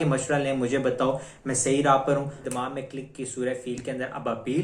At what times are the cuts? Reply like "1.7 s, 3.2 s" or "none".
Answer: 2.4 s